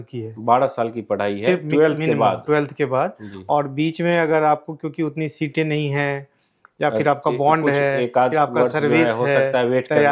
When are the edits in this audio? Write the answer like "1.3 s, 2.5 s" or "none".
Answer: none

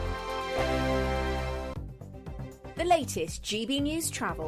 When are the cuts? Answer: 1.8 s

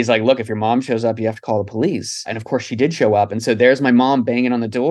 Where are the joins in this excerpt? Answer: 2.4 s

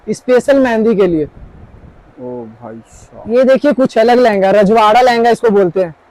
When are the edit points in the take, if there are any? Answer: 3.0 s

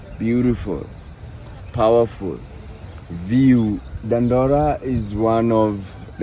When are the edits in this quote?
3.9 s

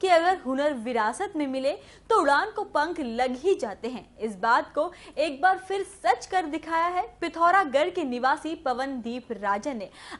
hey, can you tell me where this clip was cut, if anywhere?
none

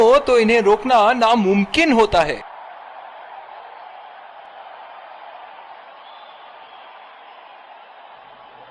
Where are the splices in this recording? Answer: none

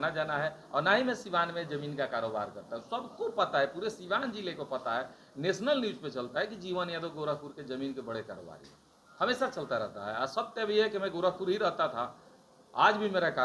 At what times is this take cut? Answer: none

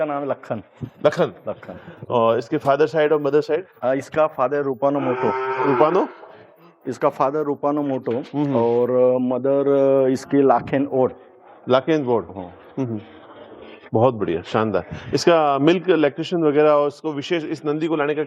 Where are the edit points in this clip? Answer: none

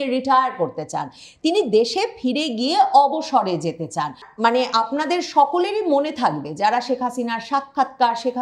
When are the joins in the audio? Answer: 4.2 s

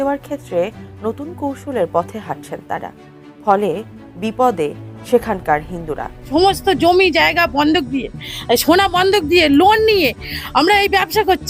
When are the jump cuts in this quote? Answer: 6.1 s

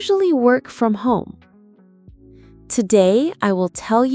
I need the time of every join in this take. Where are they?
1.4 s, 2.7 s

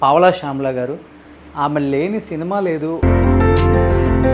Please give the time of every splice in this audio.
3.0 s

